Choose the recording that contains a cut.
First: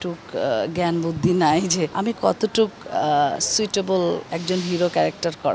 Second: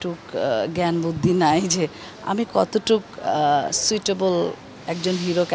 first; 2 cuts; at 1.9 s, 4.3 s

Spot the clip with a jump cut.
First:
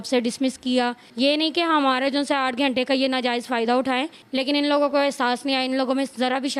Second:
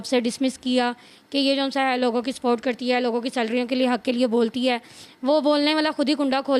first; 2 cuts; at 1.0 s, 4.2 s

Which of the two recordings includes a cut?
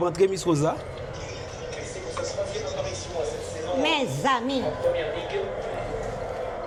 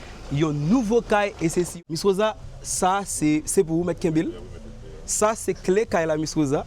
second; 1 cut; at 1.7 s

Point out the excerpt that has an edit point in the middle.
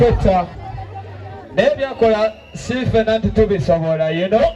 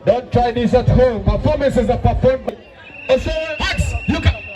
second; 1 cut; at 2.5 s

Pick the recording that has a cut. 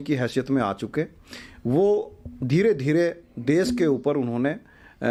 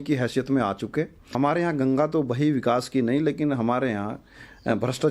second; 1 cut; at 1.3 s

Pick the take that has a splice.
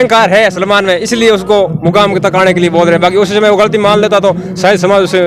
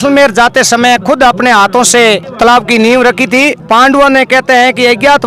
second; 2 cuts; at 2.3 s, 3.6 s

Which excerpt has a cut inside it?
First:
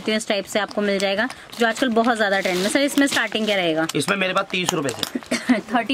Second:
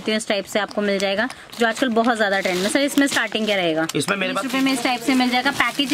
second; 1 cut; at 4.4 s

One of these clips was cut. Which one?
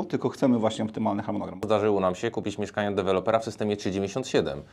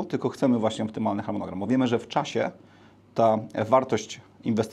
first; 1 cut; at 1.6 s

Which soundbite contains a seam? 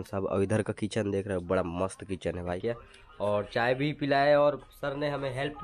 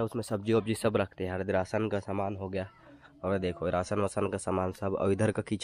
first; 1 cut; at 2.6 s

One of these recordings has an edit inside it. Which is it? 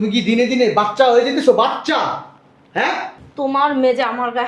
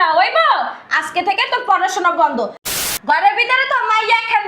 second; 1 cut; at 2.6 s

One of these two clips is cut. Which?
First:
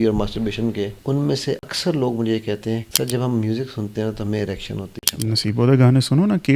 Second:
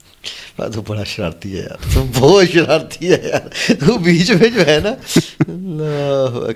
first; 3 cuts; at 1.3 s, 2.9 s, 5.0 s

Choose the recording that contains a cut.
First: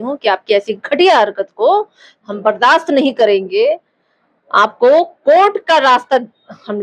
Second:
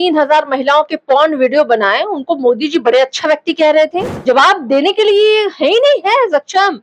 second; 1 cut; at 4.1 s

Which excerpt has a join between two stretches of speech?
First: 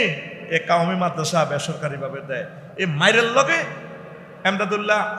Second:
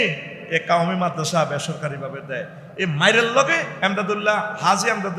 second; 1 cut; at 3.7 s

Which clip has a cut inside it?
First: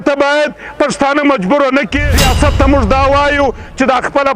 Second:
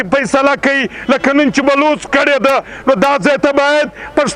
first; 1 cut; at 2.1 s

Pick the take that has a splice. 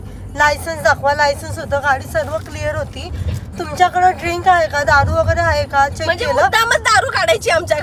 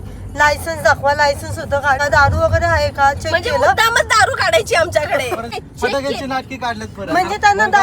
second; 2 cuts; at 2.0 s, 5.5 s

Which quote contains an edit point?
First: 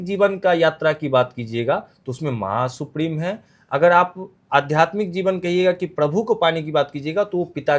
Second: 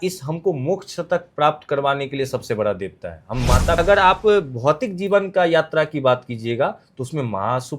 second; 1 cut; at 3.8 s

